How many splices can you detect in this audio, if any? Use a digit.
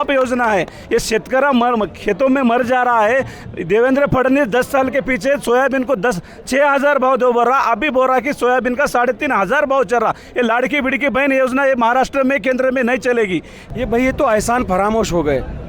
1